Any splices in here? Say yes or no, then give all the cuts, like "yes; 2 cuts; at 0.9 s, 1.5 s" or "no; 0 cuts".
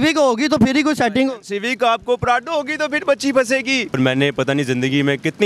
yes; 1 cut; at 4.0 s